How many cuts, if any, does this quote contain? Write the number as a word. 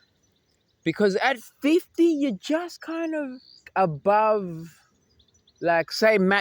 one